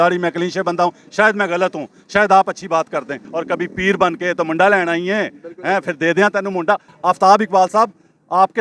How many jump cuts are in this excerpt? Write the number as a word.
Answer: two